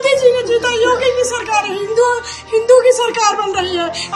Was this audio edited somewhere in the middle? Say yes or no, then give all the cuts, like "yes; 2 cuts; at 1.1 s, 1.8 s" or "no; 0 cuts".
no; 0 cuts